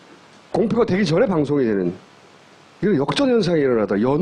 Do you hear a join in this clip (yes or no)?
no